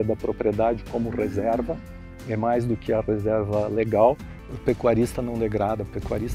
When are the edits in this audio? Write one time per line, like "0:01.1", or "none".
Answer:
0:04.4